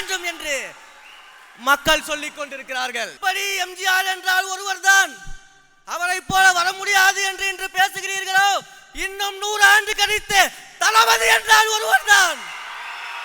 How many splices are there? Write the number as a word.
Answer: one